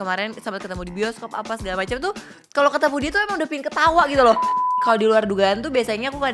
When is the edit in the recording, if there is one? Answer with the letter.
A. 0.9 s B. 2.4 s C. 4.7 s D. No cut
C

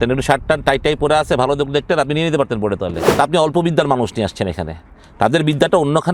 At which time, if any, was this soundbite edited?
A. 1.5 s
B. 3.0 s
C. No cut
B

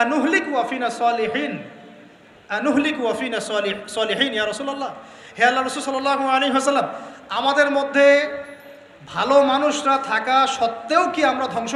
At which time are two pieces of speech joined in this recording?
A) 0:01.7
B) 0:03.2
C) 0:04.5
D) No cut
D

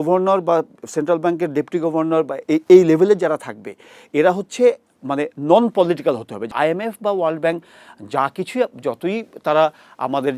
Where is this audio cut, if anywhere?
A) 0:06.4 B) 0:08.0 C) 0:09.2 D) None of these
A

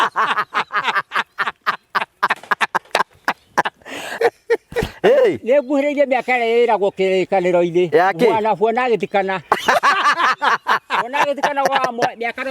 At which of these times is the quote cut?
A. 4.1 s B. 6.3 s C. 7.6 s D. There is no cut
A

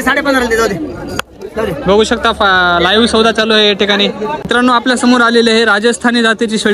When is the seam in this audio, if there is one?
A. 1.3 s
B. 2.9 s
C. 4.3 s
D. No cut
C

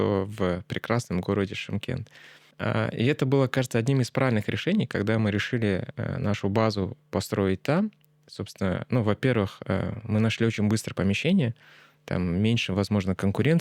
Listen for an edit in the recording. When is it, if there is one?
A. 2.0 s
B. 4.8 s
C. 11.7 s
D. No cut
D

